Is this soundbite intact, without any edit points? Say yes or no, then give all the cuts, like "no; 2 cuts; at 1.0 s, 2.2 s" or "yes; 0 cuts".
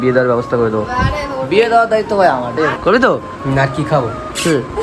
no; 1 cut; at 2.7 s